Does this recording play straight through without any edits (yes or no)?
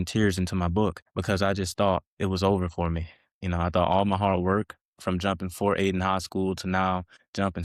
no